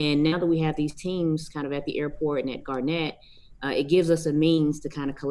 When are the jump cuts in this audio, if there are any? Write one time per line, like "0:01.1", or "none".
none